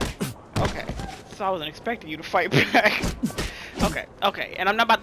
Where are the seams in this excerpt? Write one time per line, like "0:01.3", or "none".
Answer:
none